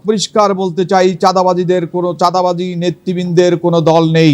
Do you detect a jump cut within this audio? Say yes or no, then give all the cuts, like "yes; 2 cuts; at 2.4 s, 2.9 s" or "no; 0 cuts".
no; 0 cuts